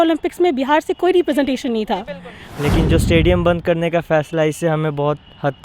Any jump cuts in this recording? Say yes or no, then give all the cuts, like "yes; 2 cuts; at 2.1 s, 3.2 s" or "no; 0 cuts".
yes; 1 cut; at 2.4 s